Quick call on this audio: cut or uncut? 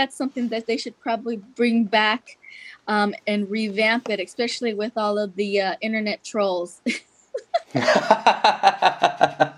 uncut